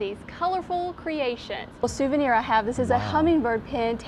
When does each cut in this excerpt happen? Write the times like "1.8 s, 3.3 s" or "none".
1.8 s

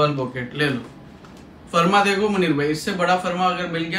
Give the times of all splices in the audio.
none

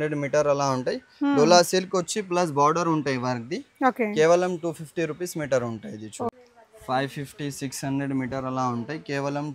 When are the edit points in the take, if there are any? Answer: 6.3 s

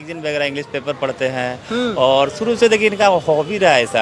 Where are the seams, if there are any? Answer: none

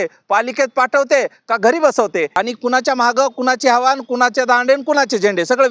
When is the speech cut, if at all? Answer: 2.3 s

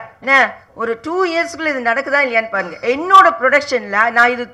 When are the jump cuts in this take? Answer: none

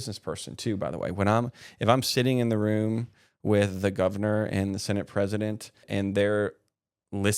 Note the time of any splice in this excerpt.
5.8 s

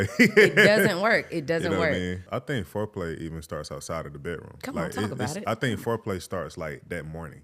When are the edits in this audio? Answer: 2.2 s

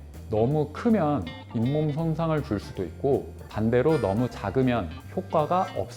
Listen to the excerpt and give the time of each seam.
3.4 s

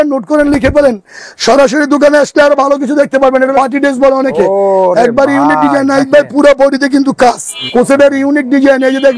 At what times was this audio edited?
3.5 s, 7.5 s

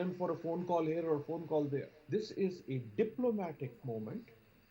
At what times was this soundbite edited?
2.0 s

